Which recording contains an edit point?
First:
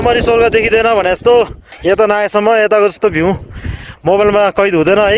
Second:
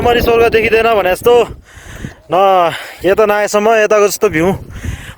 first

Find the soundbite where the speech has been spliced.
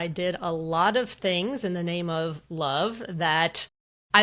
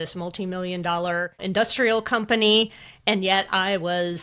second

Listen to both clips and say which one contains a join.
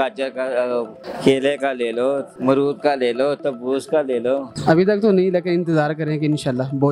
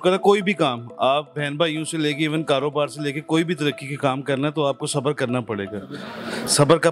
first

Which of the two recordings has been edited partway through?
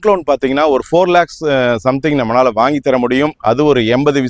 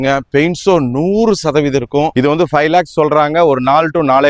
second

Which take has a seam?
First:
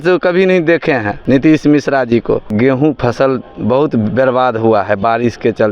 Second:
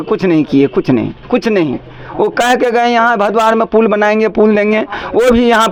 first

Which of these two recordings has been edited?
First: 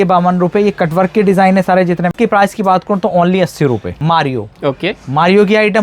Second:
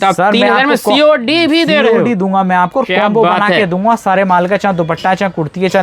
first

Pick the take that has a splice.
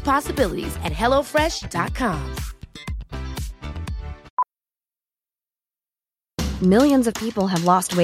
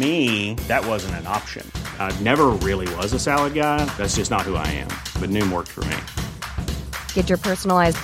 first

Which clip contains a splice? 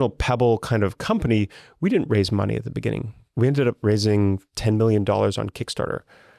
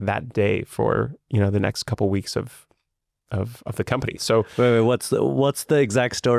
second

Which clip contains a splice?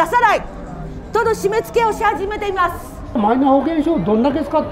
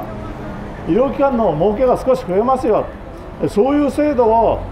first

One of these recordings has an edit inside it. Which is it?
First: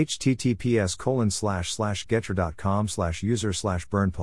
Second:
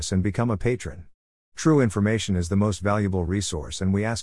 first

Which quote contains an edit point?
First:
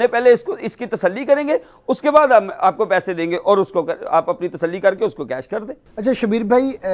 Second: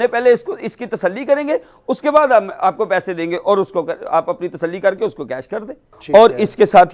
second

